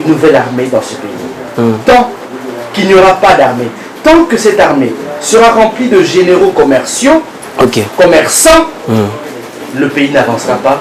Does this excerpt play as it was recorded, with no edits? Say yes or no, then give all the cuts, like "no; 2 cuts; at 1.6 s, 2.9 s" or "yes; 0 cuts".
yes; 0 cuts